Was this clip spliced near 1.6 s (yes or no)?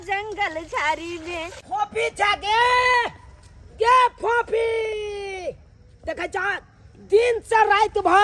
yes